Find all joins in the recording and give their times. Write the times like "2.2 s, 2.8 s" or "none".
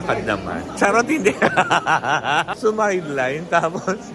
2.5 s